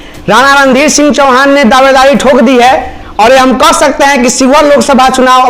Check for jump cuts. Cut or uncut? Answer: uncut